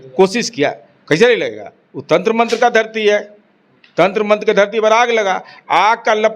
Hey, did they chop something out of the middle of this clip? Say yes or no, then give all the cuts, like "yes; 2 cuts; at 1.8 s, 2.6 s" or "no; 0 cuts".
no; 0 cuts